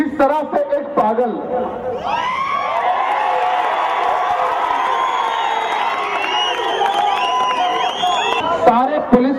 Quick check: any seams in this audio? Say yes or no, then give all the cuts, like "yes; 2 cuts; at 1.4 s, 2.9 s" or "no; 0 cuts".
no; 0 cuts